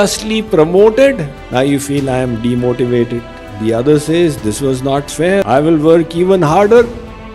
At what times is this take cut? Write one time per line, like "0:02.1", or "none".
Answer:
0:05.4